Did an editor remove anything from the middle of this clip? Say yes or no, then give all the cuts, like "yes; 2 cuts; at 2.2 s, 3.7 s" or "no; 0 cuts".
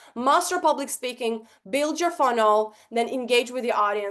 no; 0 cuts